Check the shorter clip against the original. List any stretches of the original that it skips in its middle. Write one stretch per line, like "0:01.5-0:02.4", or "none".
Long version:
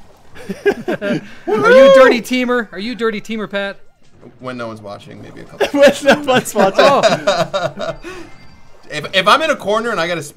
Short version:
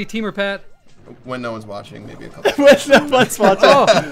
none